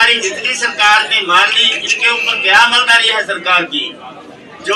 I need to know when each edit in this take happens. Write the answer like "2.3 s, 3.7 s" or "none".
none